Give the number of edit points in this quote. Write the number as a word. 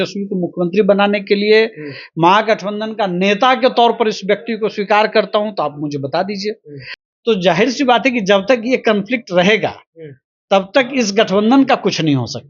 one